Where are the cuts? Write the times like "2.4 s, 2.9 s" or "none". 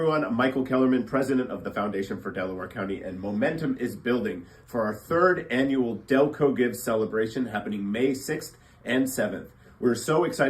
1.1 s